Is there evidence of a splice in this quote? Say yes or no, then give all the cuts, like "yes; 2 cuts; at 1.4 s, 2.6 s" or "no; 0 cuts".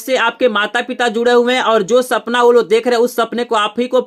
no; 0 cuts